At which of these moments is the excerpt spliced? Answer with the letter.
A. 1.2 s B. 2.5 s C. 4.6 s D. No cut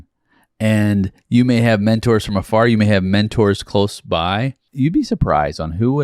C